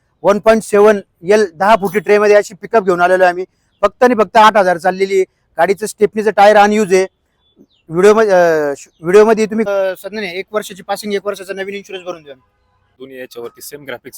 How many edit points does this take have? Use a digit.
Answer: 2